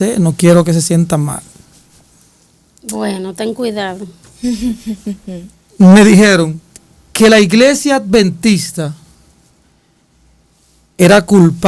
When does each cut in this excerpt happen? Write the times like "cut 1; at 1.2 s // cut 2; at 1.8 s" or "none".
none